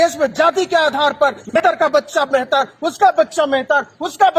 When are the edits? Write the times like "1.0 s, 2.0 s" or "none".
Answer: 1.6 s

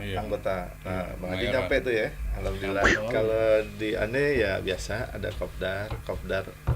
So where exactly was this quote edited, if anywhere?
2.9 s

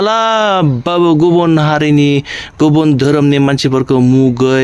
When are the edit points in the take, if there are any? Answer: none

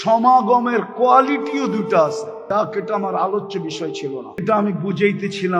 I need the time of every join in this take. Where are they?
2.3 s, 4.4 s

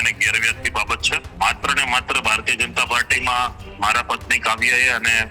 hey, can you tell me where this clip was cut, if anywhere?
1.3 s

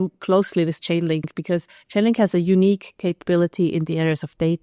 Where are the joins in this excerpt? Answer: 1.3 s

